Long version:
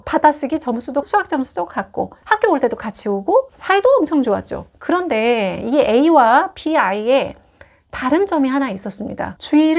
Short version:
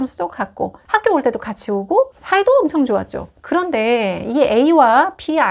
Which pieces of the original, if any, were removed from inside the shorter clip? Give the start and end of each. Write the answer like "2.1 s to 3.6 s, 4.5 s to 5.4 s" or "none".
none